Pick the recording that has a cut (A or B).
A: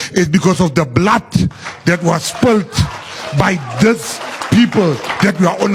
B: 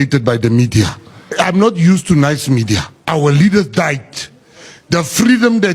B